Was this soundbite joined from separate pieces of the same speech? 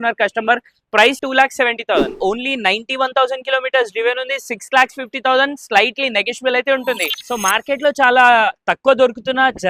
yes; 1 cut; at 2.2 s

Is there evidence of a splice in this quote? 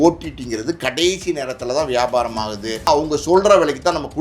yes; 1 cut; at 2.9 s

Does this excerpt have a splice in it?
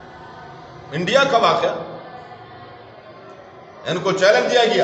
no; 0 cuts

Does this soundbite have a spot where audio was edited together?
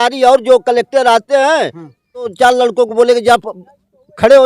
yes; 1 cut; at 2.3 s

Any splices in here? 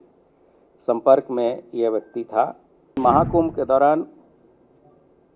yes; 1 cut; at 3.0 s

